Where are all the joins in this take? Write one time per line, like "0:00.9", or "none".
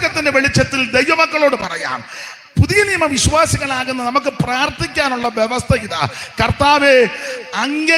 none